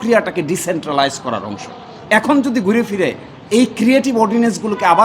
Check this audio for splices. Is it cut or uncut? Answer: uncut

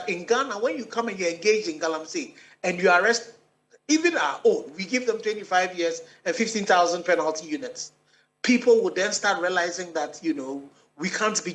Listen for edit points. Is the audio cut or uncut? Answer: uncut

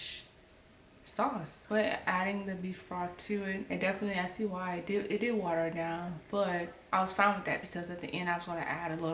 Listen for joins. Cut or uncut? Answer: cut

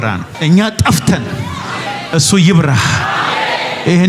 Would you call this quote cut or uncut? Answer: uncut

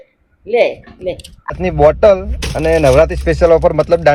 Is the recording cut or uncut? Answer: cut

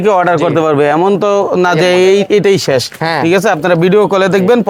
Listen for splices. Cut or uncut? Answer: uncut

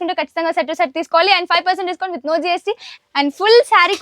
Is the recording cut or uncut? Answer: cut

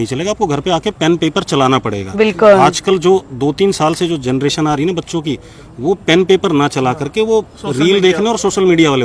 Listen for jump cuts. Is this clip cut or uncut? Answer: uncut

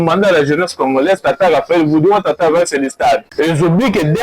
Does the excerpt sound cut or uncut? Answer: cut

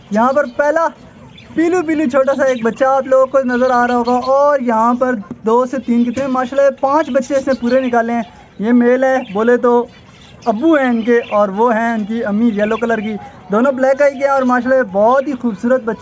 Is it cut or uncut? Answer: uncut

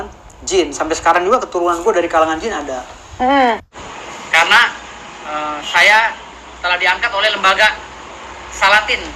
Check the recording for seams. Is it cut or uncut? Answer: cut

